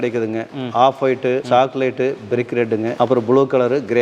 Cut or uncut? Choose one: cut